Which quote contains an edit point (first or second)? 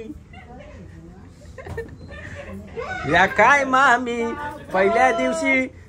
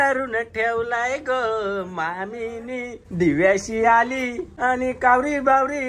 second